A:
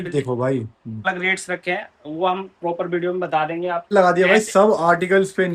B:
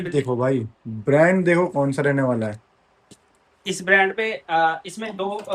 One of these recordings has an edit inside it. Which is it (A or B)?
A